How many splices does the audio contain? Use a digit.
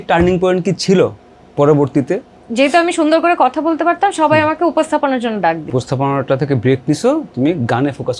2